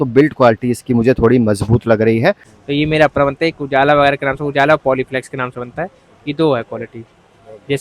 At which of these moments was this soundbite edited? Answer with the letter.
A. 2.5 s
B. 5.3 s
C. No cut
A